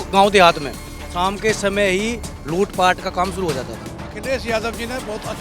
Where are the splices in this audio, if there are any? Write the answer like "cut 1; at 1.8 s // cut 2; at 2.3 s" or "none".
cut 1; at 4.1 s